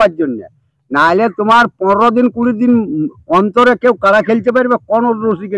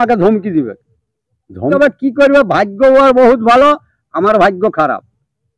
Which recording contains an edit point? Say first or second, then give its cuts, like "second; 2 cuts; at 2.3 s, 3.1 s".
second; 1 cut; at 1.7 s